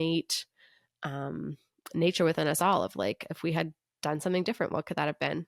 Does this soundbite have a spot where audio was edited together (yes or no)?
no